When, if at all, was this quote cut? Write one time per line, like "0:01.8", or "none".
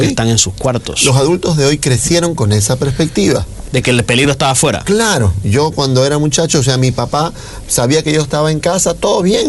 none